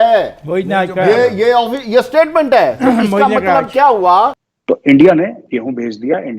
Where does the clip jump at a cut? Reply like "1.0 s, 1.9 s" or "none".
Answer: 4.5 s